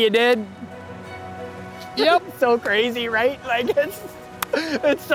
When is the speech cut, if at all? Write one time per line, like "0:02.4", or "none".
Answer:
none